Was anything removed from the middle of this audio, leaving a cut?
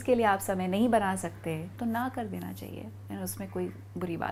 no; 0 cuts

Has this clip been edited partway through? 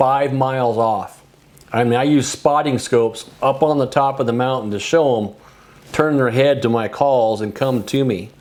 no; 0 cuts

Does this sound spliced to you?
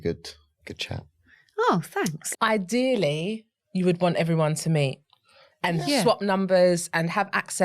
yes; 1 cut; at 2.2 s

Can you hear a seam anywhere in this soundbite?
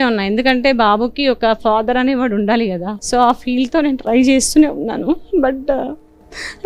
yes; 1 cut; at 2.9 s

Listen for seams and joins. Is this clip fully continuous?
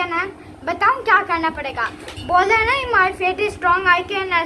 yes; 0 cuts

